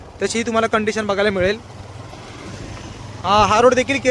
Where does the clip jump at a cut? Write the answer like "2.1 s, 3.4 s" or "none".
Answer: none